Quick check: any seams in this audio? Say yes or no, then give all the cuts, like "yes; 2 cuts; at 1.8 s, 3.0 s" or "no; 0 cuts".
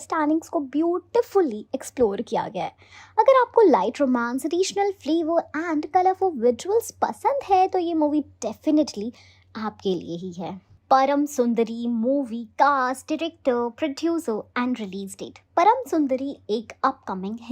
yes; 1 cut; at 10.7 s